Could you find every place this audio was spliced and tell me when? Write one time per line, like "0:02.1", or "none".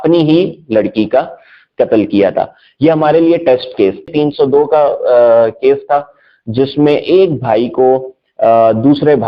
0:04.1